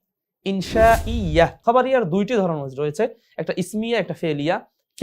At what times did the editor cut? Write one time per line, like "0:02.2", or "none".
0:01.6